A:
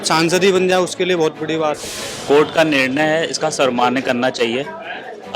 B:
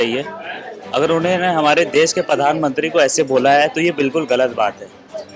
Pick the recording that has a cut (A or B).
A